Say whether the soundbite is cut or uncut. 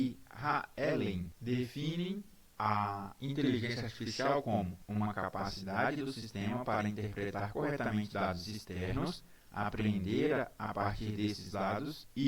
cut